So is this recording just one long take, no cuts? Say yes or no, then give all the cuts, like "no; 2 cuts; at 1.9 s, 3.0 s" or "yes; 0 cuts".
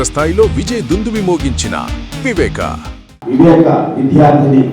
yes; 0 cuts